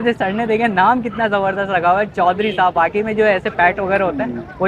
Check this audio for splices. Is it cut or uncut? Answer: uncut